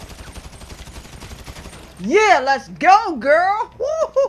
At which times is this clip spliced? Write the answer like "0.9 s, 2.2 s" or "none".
1.9 s